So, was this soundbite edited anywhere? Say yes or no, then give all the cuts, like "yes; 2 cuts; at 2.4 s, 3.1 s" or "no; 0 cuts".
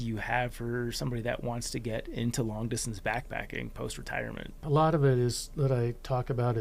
yes; 1 cut; at 4.5 s